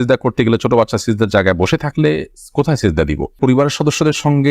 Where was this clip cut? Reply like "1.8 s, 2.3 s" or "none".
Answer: 3.3 s